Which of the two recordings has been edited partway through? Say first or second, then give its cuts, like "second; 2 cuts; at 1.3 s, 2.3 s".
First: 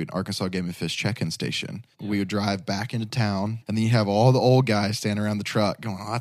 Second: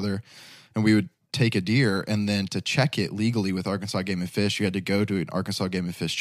first; 2 cuts; at 2.0 s, 3.6 s